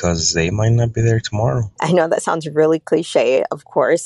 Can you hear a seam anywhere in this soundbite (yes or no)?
yes